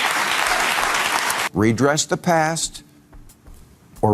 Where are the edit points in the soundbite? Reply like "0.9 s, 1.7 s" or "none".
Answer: 1.3 s